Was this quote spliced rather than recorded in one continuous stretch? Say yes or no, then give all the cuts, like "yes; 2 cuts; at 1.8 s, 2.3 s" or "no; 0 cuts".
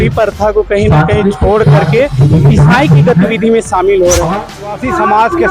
yes; 1 cut; at 4.6 s